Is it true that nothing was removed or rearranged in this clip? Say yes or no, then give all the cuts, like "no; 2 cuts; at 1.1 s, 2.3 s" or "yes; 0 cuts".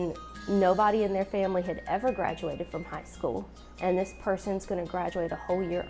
yes; 0 cuts